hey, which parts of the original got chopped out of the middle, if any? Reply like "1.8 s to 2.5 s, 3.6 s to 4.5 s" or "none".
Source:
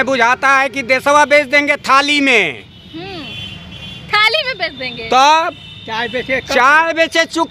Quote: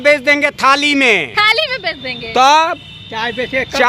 2.6 s to 4.1 s

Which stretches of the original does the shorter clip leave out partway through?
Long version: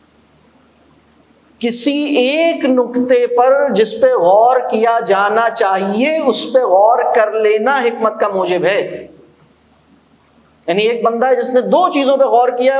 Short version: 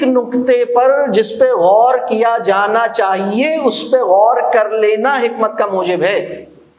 none

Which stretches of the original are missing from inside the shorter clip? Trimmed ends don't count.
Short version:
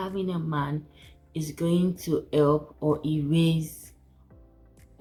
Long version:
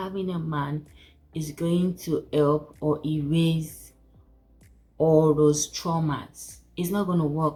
none

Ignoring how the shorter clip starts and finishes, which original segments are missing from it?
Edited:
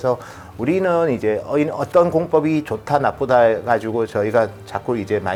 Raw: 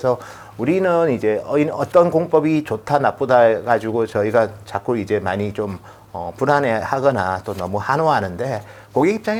none

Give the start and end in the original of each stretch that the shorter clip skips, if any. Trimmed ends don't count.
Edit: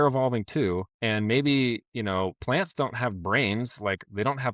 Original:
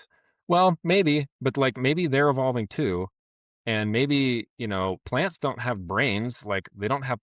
3.1 s to 3.6 s

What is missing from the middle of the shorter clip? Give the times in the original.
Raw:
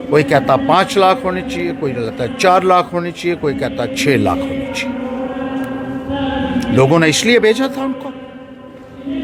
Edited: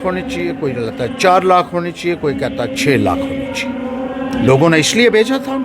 5.5 s to 6.6 s

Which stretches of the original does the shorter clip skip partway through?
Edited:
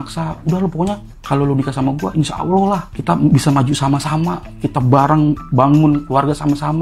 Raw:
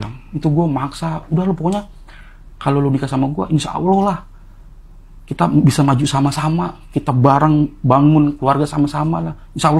2.0 s to 2.5 s, 4.3 s to 5.2 s

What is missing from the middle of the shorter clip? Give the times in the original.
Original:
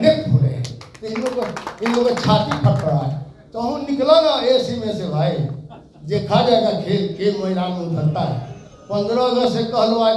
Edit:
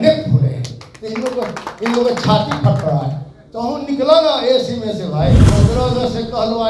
5.5 s to 8.9 s

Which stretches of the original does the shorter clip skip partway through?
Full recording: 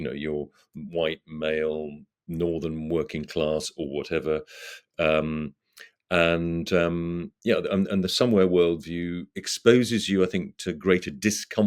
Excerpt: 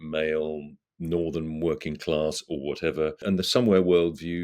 4.5 s to 7.9 s

